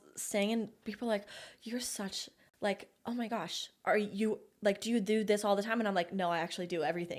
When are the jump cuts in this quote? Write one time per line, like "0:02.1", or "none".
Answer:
none